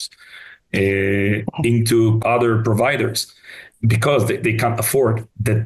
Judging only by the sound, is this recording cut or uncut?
cut